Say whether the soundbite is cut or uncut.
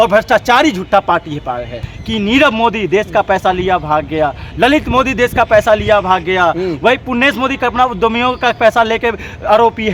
cut